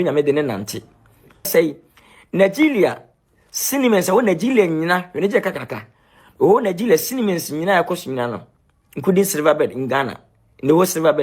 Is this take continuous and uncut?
no; 1 cut; at 1.5 s

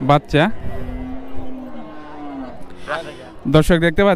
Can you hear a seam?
yes; 1 cut; at 2.5 s

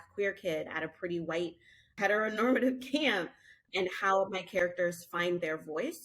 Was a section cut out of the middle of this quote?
yes; 2 cuts; at 2.0 s, 3.6 s

